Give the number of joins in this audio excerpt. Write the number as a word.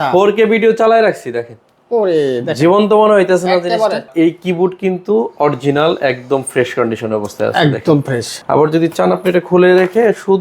two